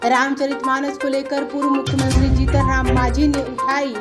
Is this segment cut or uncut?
uncut